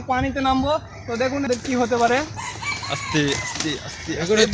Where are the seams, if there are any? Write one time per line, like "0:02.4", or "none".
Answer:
0:01.5